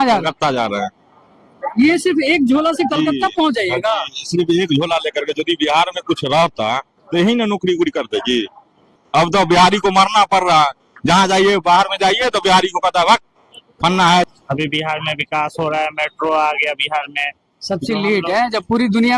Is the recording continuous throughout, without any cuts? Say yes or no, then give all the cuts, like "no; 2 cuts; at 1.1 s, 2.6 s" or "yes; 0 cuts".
no; 2 cuts; at 8.8 s, 14.3 s